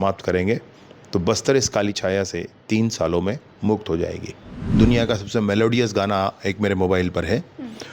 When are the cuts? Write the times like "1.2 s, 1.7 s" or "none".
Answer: 4.7 s